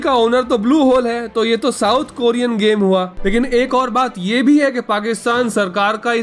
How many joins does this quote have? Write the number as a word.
one